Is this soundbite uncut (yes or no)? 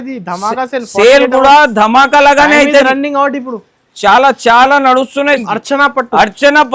no